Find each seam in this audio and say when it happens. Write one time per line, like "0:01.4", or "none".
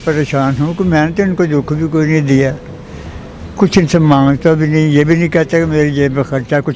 none